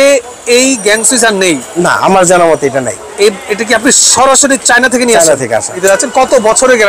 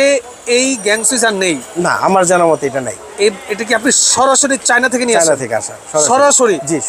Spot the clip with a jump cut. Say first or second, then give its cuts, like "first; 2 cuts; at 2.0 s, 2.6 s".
first; 1 cut; at 5.8 s